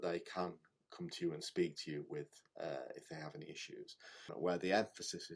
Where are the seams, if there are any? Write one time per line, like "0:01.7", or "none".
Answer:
0:04.3